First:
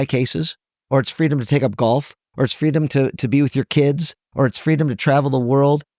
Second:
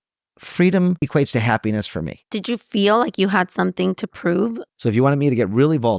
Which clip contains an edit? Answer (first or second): second